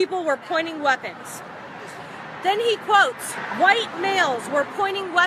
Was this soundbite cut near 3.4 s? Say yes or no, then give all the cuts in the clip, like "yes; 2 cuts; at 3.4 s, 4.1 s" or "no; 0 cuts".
no; 0 cuts